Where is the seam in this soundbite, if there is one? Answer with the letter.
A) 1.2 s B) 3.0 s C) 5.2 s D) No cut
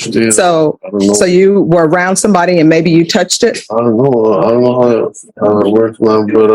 D